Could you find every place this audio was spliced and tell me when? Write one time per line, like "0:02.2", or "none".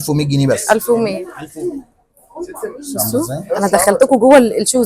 0:01.4